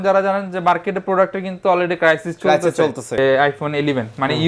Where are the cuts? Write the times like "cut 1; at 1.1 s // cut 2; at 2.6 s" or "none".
cut 1; at 3.2 s